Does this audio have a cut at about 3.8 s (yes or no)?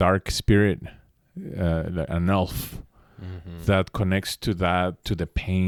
no